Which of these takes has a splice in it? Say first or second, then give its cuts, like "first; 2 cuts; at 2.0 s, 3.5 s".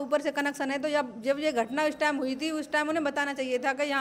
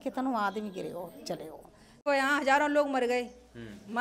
second; 1 cut; at 2.0 s